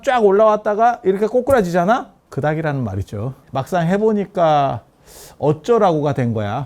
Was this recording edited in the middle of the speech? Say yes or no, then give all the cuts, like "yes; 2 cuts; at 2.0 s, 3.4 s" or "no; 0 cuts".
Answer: yes; 2 cuts; at 2.2 s, 3.4 s